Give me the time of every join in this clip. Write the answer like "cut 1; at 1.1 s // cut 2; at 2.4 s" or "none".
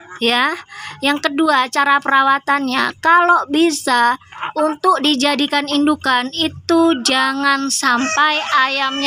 none